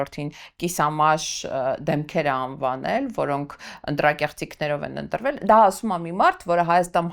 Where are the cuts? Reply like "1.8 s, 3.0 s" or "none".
none